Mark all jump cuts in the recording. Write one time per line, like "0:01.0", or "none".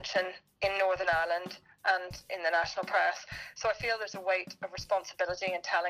none

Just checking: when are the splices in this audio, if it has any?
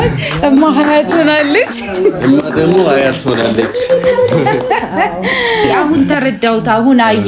0:05.8

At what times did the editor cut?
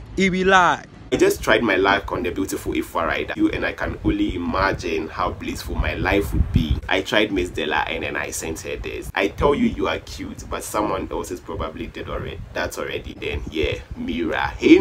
0:01.1
0:03.3
0:06.8
0:13.1

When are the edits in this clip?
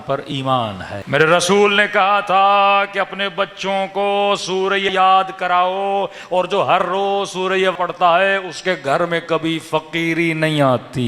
0:00.9
0:04.9
0:07.7

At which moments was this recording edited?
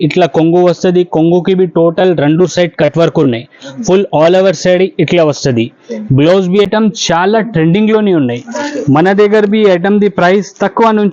0:06.7

